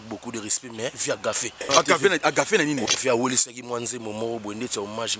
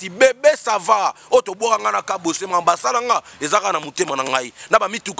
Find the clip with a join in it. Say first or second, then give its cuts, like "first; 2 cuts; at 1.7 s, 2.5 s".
first; 2 cuts; at 1.6 s, 2.8 s